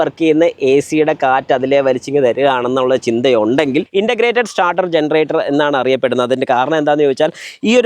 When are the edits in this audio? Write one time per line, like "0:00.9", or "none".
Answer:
0:03.9